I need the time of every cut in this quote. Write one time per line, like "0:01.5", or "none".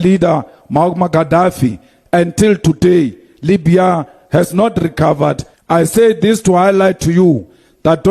0:05.5